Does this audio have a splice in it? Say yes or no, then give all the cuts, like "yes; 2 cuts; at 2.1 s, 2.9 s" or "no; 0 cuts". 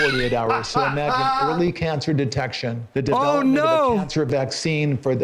yes; 1 cut; at 2.8 s